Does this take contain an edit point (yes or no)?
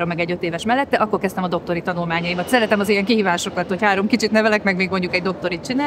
no